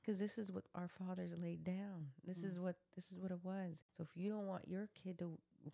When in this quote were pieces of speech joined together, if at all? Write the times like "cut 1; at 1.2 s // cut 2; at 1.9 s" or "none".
cut 1; at 3.9 s